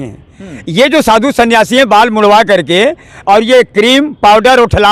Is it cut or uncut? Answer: uncut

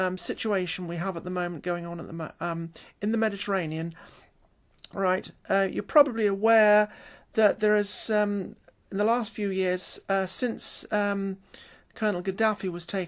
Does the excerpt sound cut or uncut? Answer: cut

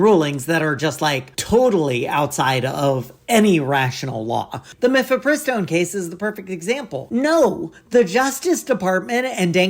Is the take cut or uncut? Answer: cut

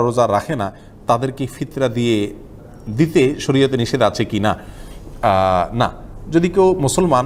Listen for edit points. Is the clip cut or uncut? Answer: uncut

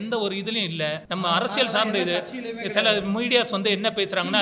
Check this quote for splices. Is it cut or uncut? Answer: cut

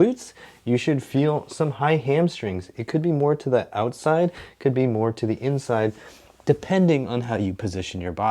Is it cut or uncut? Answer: uncut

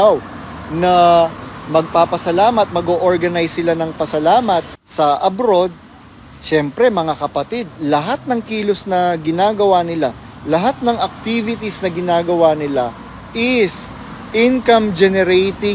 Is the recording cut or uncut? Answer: cut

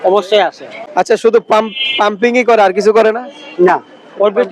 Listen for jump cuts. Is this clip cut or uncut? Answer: cut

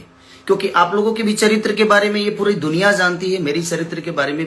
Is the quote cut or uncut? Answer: uncut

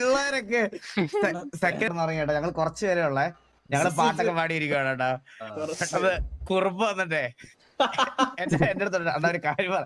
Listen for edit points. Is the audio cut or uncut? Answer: cut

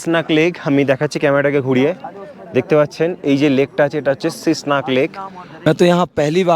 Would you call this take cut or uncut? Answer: cut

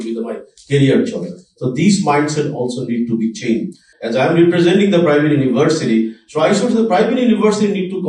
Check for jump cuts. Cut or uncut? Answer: cut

